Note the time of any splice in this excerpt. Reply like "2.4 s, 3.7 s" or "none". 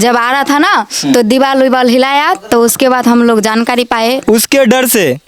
4.2 s